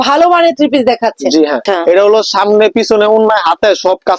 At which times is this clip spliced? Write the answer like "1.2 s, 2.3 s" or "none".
1.6 s